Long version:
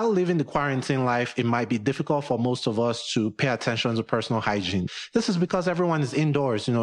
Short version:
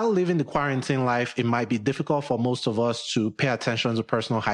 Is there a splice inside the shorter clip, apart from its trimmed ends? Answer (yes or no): no